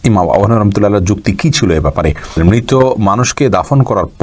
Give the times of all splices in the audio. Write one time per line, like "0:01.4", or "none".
0:02.4